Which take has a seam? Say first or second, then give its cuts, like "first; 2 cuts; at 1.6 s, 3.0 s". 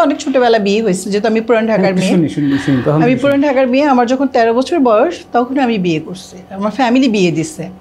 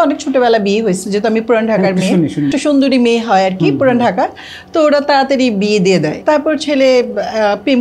second; 2 cuts; at 2.5 s, 6.1 s